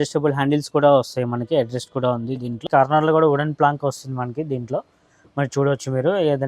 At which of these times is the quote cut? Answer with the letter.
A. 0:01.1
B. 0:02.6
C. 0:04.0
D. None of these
B